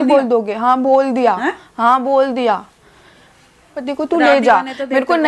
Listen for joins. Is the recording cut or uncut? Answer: cut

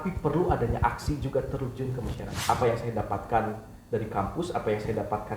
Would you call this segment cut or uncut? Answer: cut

